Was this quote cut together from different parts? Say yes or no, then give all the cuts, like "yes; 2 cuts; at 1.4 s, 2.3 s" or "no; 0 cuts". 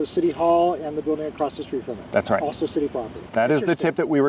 yes; 1 cut; at 3.2 s